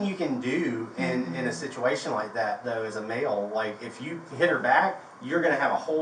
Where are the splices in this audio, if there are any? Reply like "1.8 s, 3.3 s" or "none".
none